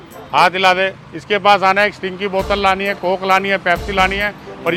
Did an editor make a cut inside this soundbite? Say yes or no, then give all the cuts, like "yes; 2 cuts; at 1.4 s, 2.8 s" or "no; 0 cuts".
no; 0 cuts